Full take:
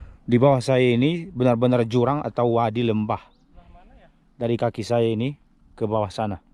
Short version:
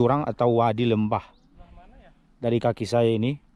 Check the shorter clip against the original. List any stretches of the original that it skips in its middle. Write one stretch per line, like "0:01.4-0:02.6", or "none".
none